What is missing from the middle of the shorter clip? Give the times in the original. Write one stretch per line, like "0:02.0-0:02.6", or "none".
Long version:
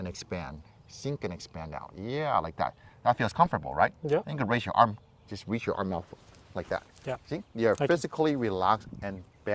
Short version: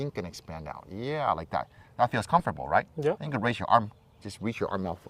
none